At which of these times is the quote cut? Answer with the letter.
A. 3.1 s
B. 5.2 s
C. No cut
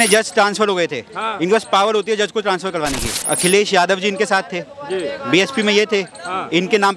A